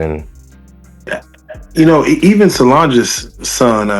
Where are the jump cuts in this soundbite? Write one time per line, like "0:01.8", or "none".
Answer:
0:01.1

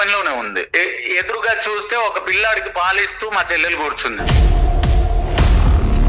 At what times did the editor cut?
0:04.2

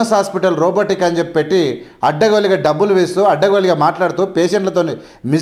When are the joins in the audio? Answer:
none

